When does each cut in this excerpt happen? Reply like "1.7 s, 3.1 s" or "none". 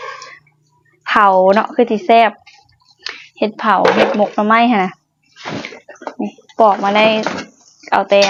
none